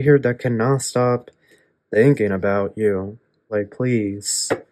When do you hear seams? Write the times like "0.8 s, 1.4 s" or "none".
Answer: 3.5 s